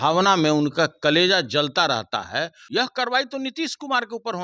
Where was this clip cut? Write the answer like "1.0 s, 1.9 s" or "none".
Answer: 2.6 s

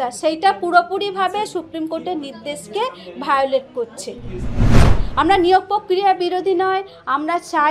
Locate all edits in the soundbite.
4.6 s

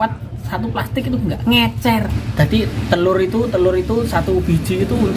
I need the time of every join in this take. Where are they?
2.2 s

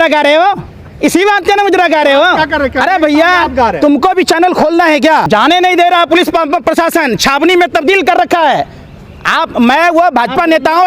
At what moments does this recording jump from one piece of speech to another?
5.3 s

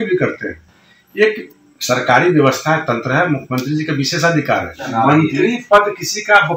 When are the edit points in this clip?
4.8 s

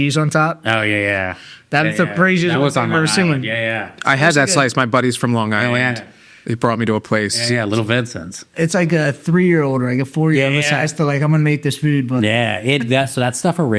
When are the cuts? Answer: none

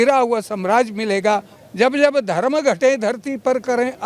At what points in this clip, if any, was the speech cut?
1.6 s

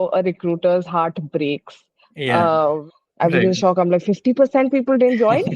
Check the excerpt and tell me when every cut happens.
2.8 s

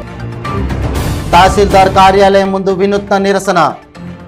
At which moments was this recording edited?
none

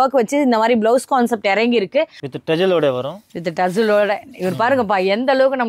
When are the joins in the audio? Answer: 2.2 s

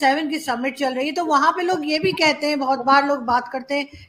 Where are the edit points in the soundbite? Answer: none

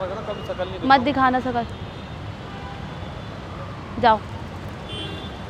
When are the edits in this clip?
none

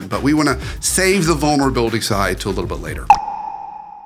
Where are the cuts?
2.9 s

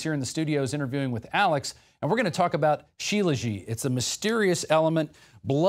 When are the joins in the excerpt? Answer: 3.7 s

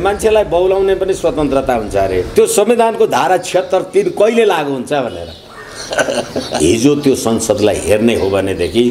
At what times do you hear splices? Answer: 2.3 s, 6.5 s

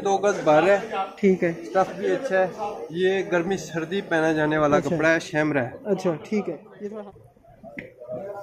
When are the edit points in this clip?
6.7 s

